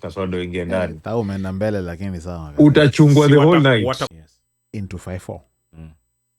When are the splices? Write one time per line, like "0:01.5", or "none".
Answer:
0:04.1

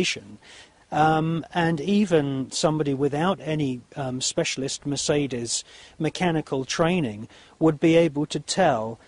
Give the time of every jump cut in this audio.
0:08.0

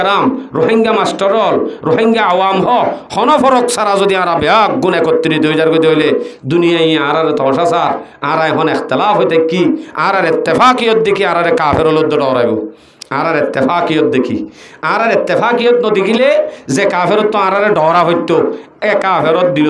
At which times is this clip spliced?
none

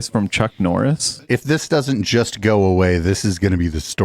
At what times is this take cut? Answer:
0:01.1

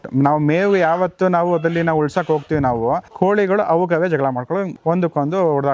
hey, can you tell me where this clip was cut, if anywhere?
0:03.1
0:04.7

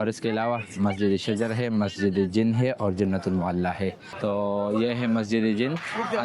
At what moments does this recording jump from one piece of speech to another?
0:04.1

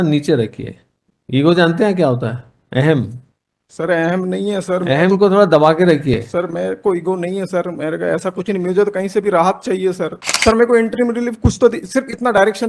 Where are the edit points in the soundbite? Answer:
0:10.2

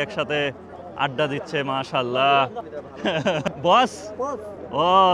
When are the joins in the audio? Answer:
0:02.9

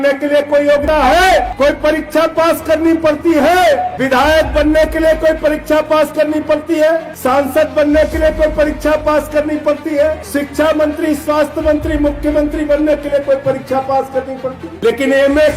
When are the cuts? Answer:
0:00.8
0:01.5
0:03.9
0:07.1
0:10.2
0:14.7

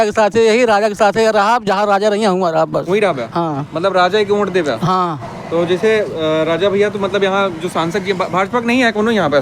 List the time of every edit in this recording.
none

